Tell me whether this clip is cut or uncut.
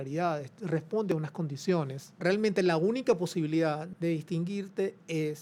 cut